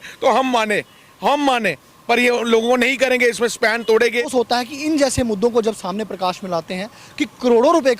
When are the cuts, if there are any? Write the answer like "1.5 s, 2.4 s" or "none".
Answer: 4.3 s